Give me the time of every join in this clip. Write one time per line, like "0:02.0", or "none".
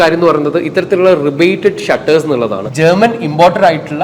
0:02.7